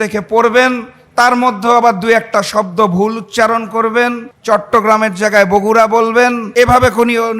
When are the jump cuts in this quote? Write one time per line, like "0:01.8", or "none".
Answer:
0:04.3
0:06.4